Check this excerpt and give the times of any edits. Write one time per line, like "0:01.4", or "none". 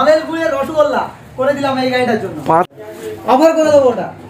0:02.7

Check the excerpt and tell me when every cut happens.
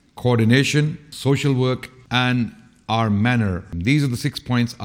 0:01.0
0:01.9
0:03.7

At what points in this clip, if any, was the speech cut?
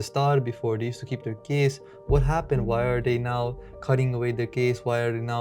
none

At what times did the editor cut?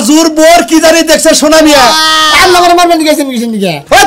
0:02.1

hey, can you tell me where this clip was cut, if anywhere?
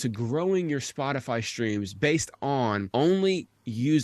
0:02.9

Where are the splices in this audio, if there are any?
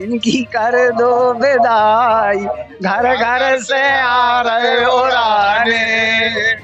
none

